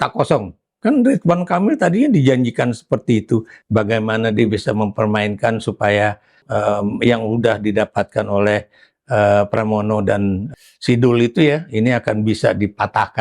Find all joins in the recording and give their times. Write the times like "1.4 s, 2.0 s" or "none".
3.6 s, 6.4 s, 10.5 s